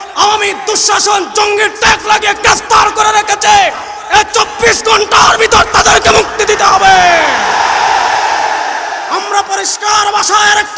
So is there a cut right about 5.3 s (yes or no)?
no